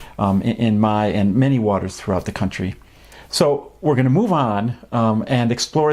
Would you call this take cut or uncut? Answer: uncut